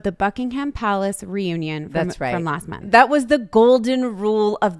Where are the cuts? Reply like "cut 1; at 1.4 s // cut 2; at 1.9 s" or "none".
cut 1; at 2.8 s

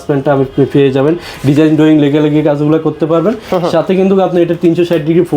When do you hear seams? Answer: none

